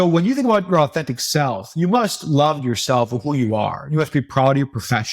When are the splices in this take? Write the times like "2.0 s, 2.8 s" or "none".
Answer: none